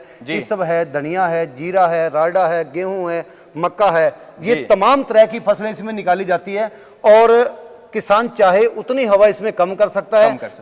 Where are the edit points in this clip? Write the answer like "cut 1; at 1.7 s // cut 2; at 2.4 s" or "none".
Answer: none